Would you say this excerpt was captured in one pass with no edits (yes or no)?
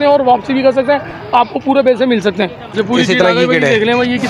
no